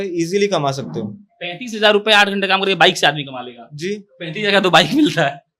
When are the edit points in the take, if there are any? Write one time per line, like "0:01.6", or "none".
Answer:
none